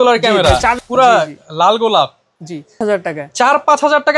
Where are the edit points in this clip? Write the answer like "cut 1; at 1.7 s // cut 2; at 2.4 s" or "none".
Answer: cut 1; at 0.8 s // cut 2; at 2.8 s

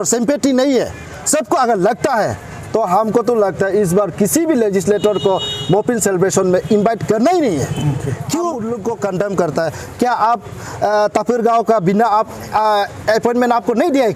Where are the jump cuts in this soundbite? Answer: cut 1; at 8.7 s

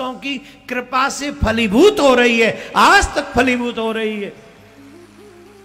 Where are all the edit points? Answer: none

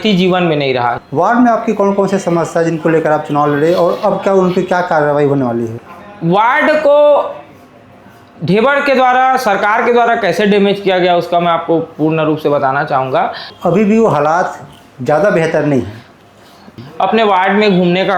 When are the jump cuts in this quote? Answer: cut 1; at 1.0 s // cut 2; at 5.7 s // cut 3; at 13.5 s // cut 4; at 16.8 s

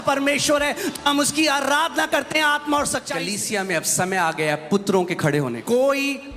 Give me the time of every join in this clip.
cut 1; at 3.2 s // cut 2; at 5.6 s

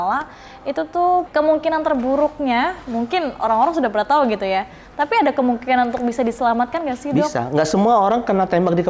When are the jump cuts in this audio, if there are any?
cut 1; at 1.3 s

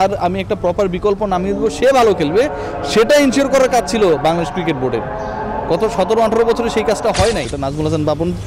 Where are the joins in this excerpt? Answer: cut 1; at 7.5 s

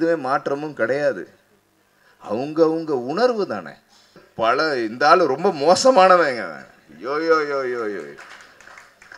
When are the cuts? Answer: cut 1; at 4.2 s

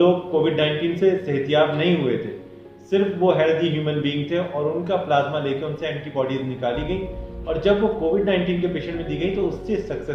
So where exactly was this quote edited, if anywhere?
none

